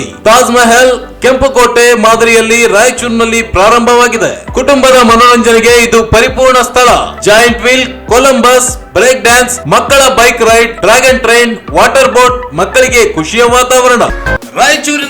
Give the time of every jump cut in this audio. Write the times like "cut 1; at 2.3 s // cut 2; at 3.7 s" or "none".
cut 1; at 14.2 s